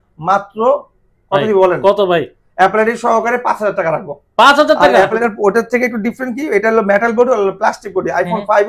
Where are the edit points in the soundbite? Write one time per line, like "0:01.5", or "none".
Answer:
0:05.2